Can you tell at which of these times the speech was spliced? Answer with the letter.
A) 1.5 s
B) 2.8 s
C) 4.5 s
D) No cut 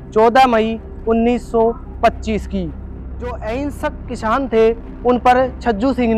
B